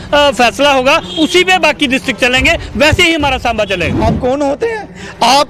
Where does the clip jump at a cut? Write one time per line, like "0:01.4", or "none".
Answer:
0:03.9